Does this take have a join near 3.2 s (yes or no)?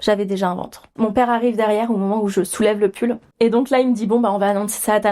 yes